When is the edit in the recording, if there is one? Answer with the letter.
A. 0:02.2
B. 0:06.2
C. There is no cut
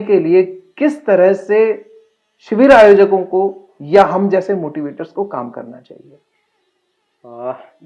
C